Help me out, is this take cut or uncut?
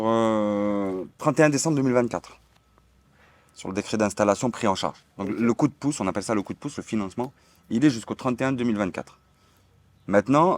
uncut